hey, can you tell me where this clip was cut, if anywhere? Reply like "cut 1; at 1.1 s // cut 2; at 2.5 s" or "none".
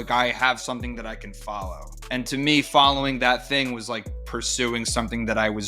cut 1; at 1.9 s